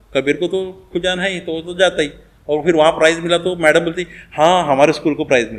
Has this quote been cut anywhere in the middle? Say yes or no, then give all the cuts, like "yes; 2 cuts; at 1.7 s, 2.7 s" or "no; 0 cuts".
no; 0 cuts